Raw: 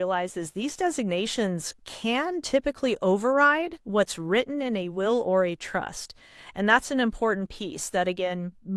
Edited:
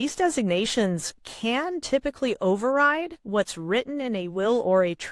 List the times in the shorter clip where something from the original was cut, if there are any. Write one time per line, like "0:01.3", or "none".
none